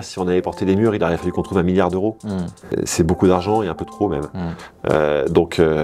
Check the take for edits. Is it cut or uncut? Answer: cut